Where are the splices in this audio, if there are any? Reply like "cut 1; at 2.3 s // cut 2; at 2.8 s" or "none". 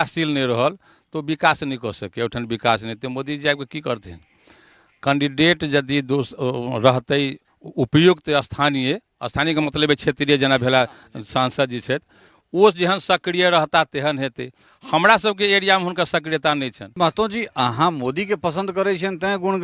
cut 1; at 16.8 s

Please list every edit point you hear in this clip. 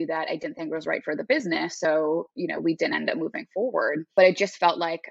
cut 1; at 4.1 s

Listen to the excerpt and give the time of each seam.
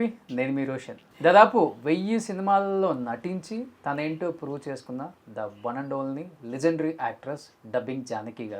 cut 1; at 1.0 s

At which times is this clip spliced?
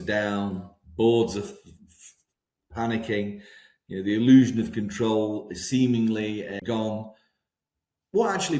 cut 1; at 6.6 s

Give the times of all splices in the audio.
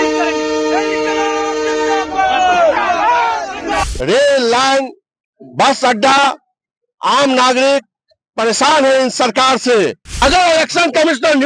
cut 1; at 3.9 s // cut 2; at 10.1 s

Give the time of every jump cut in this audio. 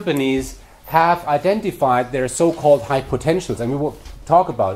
cut 1; at 3.0 s

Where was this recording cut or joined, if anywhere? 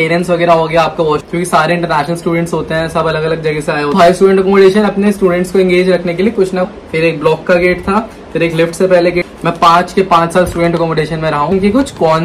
cut 1; at 1.3 s // cut 2; at 3.9 s // cut 3; at 6.7 s // cut 4; at 9.3 s // cut 5; at 11.5 s

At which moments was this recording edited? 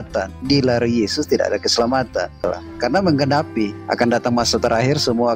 cut 1; at 2.4 s

